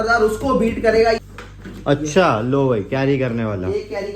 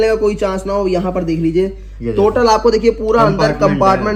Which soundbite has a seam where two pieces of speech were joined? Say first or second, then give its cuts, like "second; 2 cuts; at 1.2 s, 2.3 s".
first; 1 cut; at 1.2 s